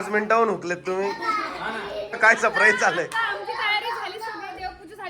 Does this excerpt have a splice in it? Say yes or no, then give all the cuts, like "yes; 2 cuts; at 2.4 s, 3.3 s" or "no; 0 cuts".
yes; 1 cut; at 2.2 s